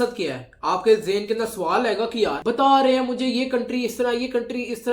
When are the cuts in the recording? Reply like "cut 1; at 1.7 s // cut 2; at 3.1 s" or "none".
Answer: none